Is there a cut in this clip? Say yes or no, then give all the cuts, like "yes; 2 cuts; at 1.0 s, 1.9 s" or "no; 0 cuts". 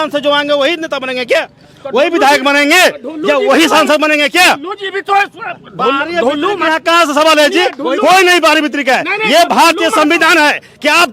no; 0 cuts